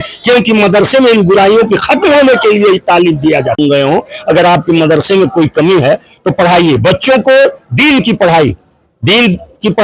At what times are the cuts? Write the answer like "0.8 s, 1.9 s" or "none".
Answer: 3.6 s